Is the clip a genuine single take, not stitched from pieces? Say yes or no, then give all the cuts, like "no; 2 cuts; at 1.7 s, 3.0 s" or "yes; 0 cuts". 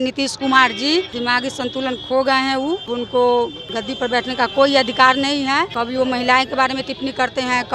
no; 4 cuts; at 1.2 s, 2.9 s, 3.7 s, 5.7 s